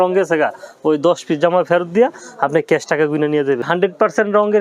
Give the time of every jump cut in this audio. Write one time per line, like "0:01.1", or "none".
0:03.7